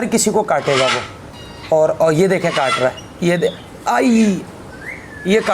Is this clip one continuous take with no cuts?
no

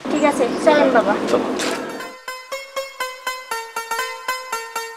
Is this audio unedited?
yes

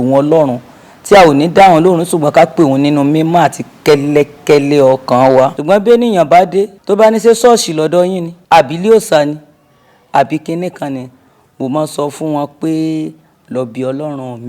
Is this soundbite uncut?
no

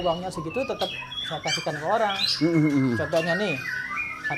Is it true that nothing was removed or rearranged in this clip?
yes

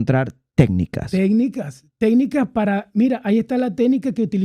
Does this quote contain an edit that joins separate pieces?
no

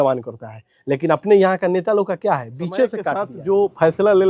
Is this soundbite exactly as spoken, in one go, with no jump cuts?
no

